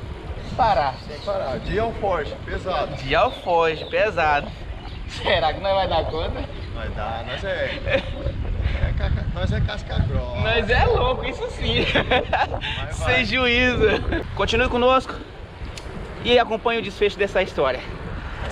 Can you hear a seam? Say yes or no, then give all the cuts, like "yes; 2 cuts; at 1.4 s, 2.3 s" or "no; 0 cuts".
yes; 1 cut; at 14.3 s